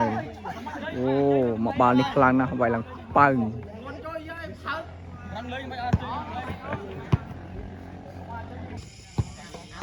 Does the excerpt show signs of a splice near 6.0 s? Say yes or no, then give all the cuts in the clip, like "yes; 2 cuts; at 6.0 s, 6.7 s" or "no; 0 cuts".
no; 1 cut; at 8.8 s